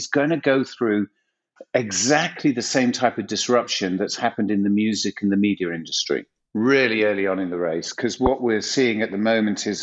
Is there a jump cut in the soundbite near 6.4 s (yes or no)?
yes